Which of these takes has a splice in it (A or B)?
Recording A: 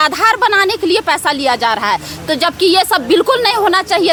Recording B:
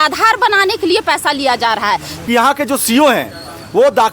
B